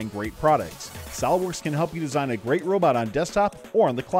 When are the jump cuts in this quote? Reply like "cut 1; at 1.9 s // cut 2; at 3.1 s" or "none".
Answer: none